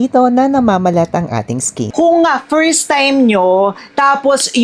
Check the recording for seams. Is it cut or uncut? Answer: cut